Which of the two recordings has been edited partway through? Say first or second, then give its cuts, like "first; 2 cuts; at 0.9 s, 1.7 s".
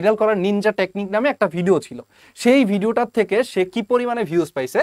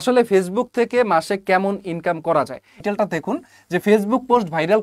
second; 1 cut; at 2.8 s